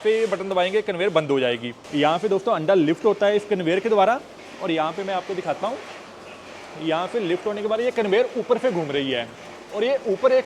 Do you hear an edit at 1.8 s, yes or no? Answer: no